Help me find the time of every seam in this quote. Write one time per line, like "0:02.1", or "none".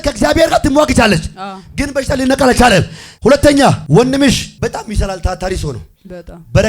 0:03.0
0:03.8
0:04.5